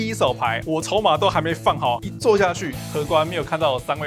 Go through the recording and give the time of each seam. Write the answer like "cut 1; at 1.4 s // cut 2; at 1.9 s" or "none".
cut 1; at 2.0 s // cut 2; at 2.7 s